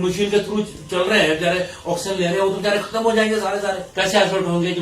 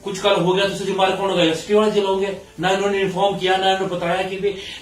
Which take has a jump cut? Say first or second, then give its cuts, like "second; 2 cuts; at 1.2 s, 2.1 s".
first; 1 cut; at 3.9 s